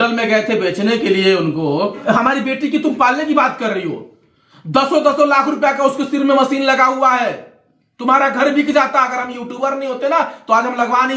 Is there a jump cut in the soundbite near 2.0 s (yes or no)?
yes